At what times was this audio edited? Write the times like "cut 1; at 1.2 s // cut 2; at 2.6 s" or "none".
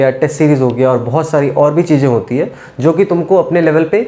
none

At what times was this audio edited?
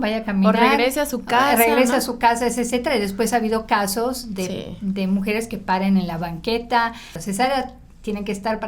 cut 1; at 7.1 s

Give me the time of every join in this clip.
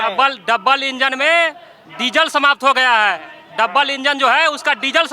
none

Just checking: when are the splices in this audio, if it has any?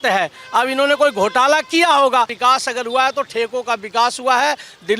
cut 1; at 2.3 s

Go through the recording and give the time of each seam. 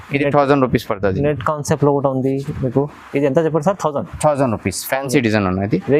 none

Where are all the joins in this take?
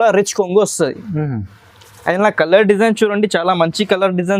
none

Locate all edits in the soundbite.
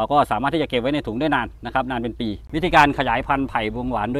cut 1; at 2.4 s

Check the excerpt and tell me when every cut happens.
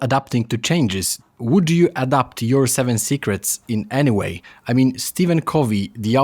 cut 1; at 1.1 s

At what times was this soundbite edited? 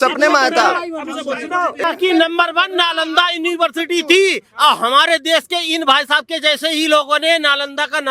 cut 1; at 1.8 s

